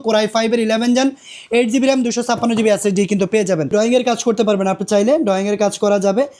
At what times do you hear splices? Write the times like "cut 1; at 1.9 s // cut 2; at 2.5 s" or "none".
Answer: cut 1; at 3.7 s